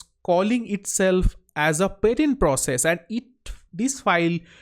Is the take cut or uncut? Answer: uncut